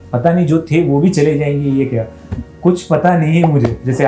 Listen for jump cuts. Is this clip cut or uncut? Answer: uncut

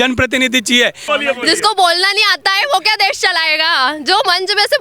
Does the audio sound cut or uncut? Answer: cut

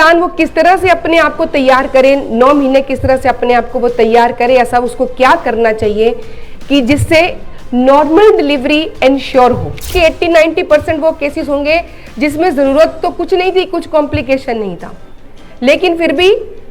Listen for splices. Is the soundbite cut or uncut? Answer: cut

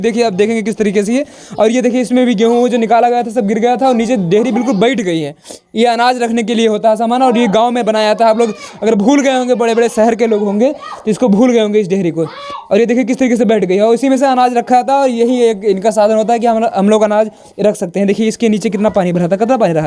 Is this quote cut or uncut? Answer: uncut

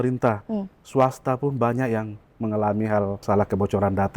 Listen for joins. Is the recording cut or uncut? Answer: cut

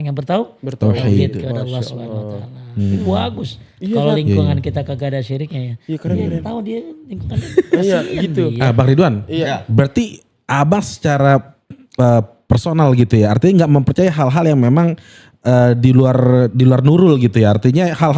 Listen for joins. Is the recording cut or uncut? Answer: uncut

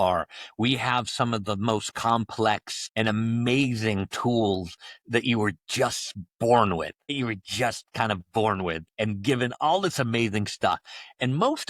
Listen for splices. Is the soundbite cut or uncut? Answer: uncut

